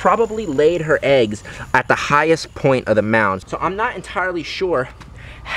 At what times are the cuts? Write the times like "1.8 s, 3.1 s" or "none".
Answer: 3.4 s